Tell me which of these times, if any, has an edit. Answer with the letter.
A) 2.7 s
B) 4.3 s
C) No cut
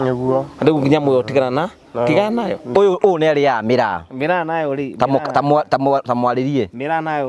A